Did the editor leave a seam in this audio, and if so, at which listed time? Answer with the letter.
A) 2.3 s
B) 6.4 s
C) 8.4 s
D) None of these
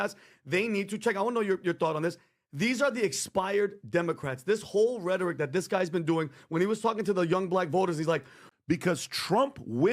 C